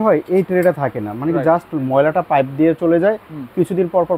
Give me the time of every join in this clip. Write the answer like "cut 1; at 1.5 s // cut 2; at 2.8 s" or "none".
none